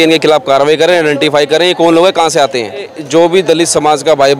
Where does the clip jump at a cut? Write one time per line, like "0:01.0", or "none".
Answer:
0:03.0